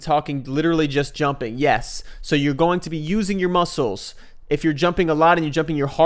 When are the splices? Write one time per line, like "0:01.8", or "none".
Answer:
none